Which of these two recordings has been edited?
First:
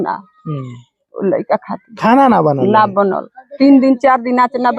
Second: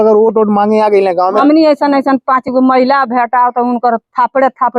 second; 1 cut; at 1.4 s

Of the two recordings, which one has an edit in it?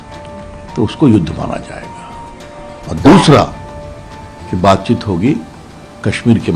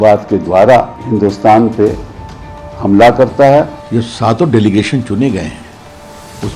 second; 2 cuts; at 1.0 s, 3.8 s

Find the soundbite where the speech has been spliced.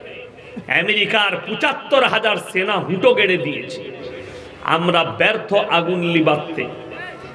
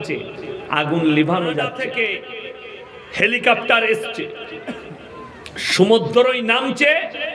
second; 1 cut; at 1.8 s

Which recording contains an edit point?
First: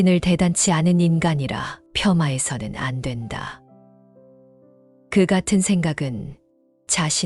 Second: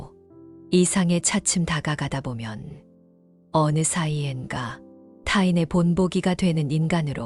first; 2 cuts; at 3.7 s, 5.1 s

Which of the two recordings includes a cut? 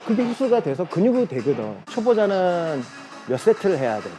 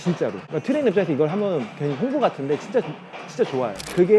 first; 1 cut; at 1.9 s

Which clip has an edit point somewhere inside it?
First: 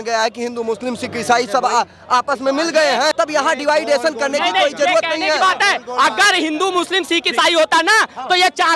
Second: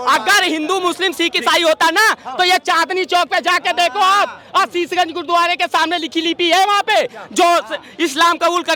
first; 1 cut; at 3.1 s

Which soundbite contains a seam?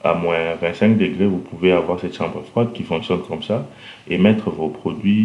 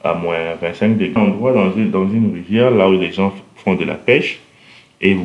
second; 1 cut; at 1.1 s

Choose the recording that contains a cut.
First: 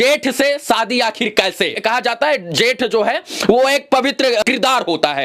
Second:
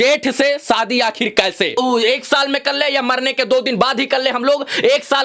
second; 1 cut; at 1.8 s

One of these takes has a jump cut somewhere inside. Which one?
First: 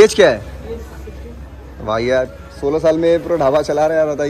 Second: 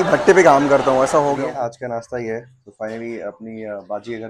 second; 1 cut; at 1.4 s

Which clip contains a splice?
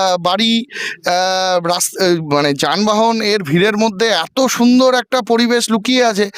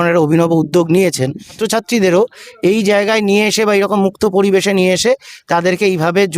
second; 1 cut; at 1.5 s

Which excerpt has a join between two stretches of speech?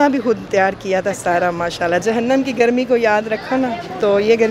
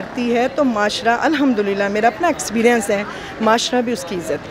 first; 1 cut; at 2.0 s

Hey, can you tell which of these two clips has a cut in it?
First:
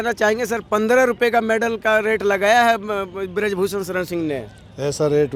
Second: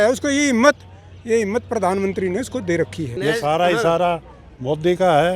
second; 1 cut; at 3.1 s

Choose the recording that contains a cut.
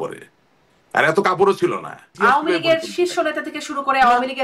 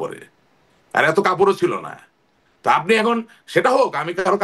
first; 1 cut; at 2.1 s

